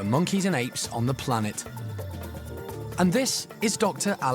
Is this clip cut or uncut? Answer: cut